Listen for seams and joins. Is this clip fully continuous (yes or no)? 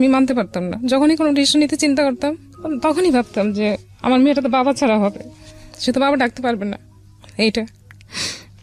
yes